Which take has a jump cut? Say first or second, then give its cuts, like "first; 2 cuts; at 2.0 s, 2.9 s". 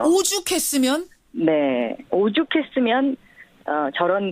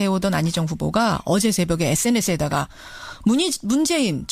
first; 1 cut; at 1.8 s